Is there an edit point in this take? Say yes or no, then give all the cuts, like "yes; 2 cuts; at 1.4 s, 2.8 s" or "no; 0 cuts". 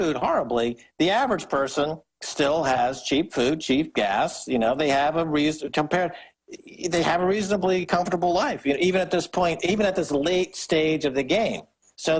yes; 1 cut; at 3.3 s